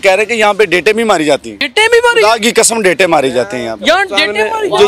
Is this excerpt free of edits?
no; 1 cut; at 1.6 s

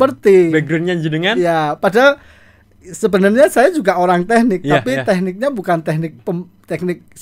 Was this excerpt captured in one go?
yes; 0 cuts

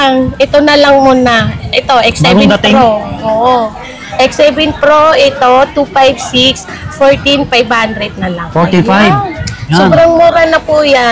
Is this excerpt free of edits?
yes; 0 cuts

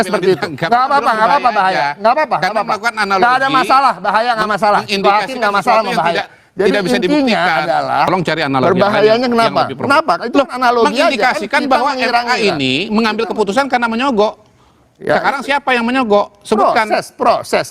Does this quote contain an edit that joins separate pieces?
yes; 1 cut; at 8.1 s

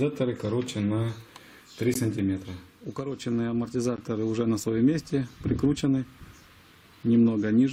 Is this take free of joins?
yes; 0 cuts

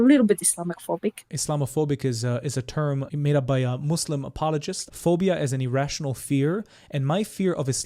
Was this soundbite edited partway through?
yes; 3 cuts; at 1.2 s, 3.1 s, 4.8 s

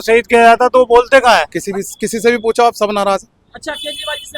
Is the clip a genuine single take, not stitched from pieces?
no; 1 cut; at 1.6 s

